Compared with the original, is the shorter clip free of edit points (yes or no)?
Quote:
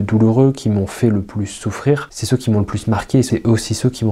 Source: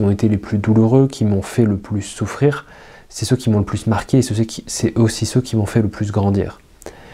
no